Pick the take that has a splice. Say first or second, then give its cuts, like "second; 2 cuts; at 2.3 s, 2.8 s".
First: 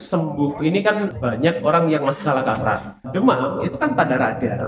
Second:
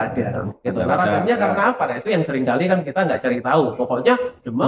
first; 2 cuts; at 1.1 s, 3.1 s